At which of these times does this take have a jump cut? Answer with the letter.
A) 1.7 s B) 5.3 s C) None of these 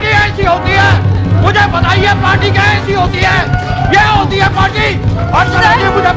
C